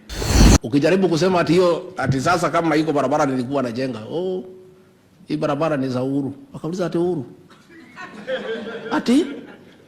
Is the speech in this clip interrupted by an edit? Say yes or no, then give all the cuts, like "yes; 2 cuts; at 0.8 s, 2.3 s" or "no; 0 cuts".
no; 0 cuts